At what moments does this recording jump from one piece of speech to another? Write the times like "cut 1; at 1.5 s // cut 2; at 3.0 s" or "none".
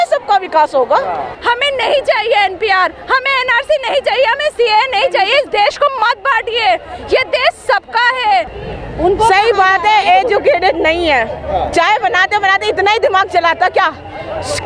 cut 1; at 1.4 s // cut 2; at 8.6 s